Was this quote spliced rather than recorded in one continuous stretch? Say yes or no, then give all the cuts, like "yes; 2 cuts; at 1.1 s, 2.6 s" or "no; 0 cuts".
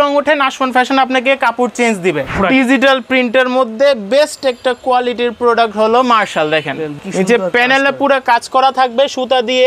yes; 2 cuts; at 2.3 s, 7.0 s